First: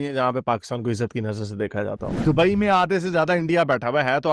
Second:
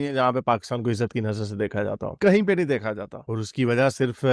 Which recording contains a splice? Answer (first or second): first